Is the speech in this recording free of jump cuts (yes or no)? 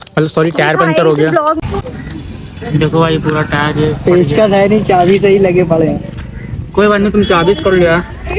no